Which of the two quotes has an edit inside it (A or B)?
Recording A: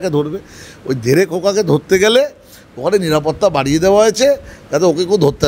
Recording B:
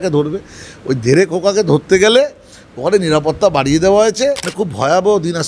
B